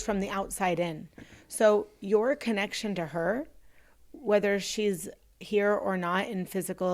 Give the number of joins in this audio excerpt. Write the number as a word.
zero